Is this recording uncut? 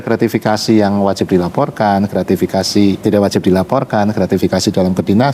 no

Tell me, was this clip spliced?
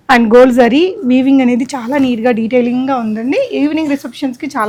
no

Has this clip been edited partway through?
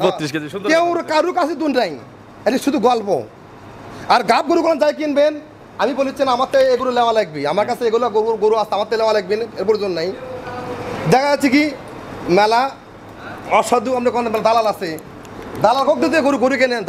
no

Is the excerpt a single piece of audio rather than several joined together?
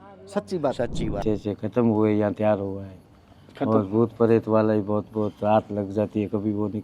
no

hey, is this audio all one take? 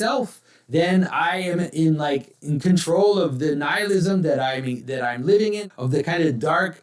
no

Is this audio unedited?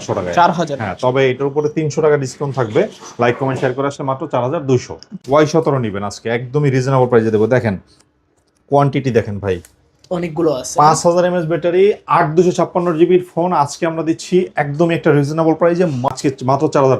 no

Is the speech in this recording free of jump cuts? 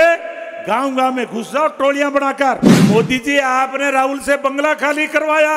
no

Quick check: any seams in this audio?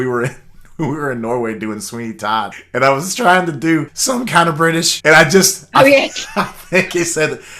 yes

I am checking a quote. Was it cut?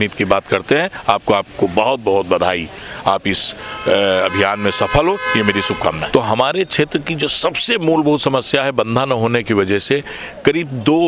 yes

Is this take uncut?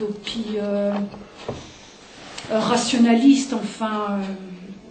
yes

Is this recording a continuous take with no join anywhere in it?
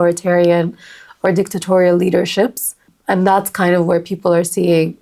no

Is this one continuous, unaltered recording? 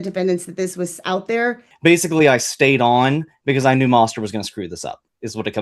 no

